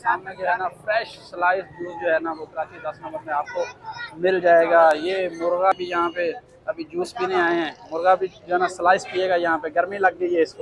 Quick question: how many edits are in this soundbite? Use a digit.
1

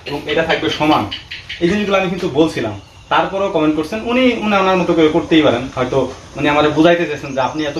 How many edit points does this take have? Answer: 0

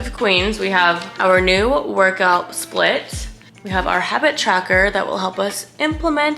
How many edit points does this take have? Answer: 1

